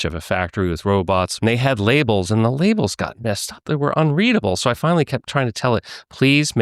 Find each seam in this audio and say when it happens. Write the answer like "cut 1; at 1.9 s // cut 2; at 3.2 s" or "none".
cut 1; at 1.3 s // cut 2; at 3.6 s